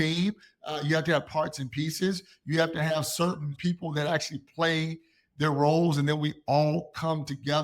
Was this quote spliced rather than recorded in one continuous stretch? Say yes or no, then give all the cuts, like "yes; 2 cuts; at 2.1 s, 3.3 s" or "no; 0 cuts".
yes; 1 cut; at 3.5 s